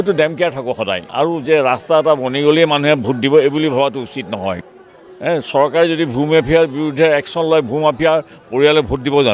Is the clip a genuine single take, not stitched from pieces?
no; 2 cuts; at 1.1 s, 4.6 s

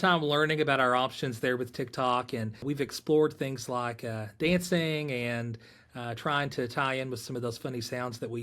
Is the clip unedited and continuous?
no; 1 cut; at 2.6 s

